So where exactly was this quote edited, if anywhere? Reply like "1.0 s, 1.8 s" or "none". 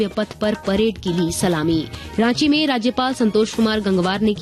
2.0 s